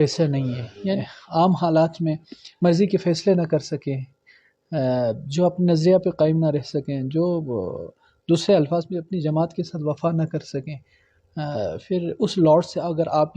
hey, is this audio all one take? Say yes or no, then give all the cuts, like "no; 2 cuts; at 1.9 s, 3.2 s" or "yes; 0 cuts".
no; 1 cut; at 1.0 s